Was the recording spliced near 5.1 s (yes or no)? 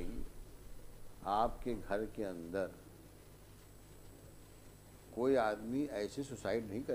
no